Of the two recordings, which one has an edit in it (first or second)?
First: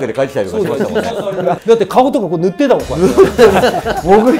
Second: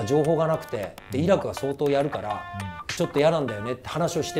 first